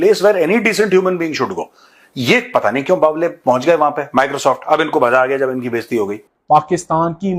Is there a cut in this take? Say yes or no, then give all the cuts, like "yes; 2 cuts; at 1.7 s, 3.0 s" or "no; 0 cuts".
yes; 1 cut; at 6.3 s